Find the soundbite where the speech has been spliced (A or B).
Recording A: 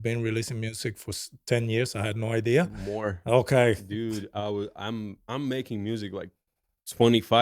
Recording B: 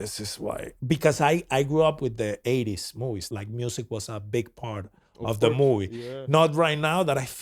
B